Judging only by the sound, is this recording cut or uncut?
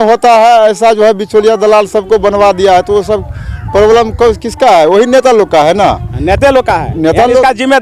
uncut